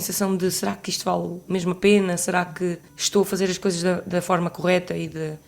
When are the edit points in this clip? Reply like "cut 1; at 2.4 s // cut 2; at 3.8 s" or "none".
cut 1; at 2.9 s